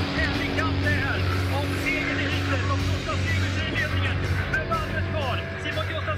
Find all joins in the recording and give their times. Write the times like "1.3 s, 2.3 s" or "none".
none